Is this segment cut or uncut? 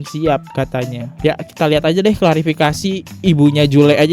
cut